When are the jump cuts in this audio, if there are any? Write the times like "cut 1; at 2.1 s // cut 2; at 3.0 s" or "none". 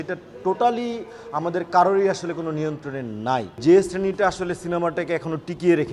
cut 1; at 3.6 s